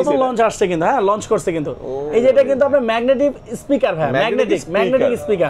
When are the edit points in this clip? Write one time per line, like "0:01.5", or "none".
none

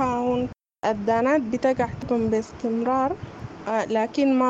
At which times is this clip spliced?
none

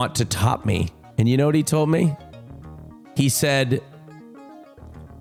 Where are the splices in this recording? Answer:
none

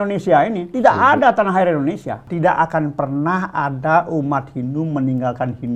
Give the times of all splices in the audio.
0:02.3

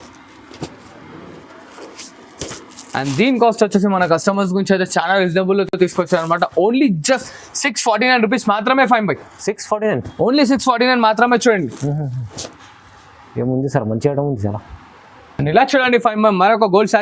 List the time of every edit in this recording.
none

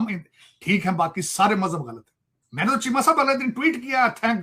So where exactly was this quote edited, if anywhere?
none

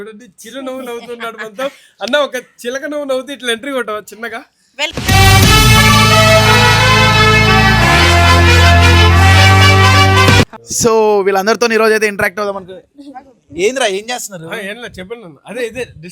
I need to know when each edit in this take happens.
0:04.9
0:10.6

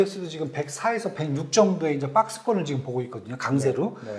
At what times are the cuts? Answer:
none

